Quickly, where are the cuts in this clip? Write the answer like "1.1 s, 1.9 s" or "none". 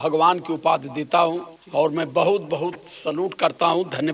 1.5 s